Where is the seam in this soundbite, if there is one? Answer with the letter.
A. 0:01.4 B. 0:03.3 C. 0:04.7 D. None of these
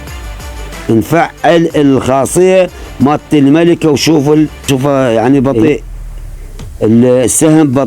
C